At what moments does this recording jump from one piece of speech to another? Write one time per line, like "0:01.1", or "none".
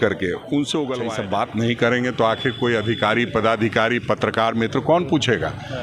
0:01.1